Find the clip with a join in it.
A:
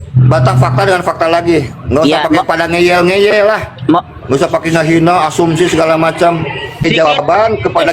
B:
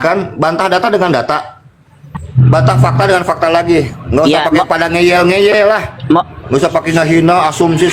A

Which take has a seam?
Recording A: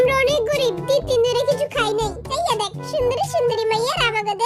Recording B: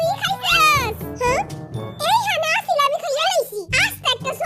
A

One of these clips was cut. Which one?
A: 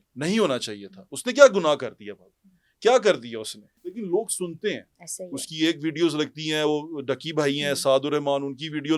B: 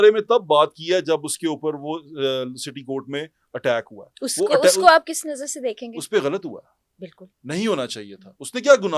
A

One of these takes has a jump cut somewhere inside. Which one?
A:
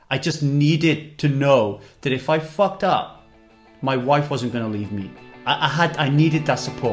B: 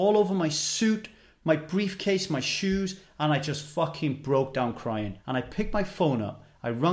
B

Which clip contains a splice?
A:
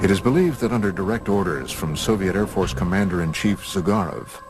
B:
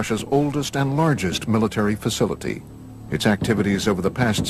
A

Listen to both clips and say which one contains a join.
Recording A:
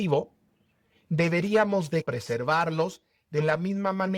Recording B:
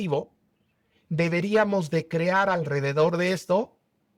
A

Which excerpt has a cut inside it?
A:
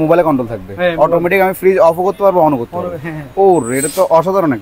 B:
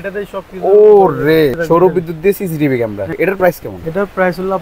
B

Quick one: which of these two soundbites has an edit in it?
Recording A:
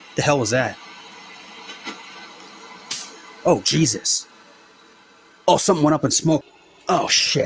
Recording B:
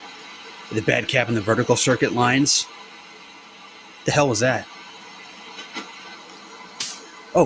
A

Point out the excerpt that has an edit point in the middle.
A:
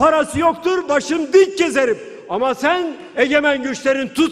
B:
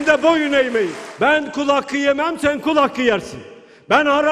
B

